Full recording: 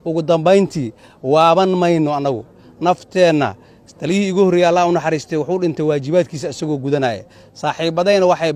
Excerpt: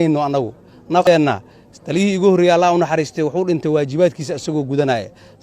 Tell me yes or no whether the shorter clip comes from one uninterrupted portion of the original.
no